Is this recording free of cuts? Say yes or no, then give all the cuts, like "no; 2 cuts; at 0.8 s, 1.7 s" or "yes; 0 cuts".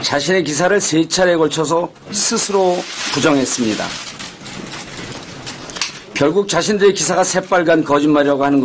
no; 1 cut; at 2.1 s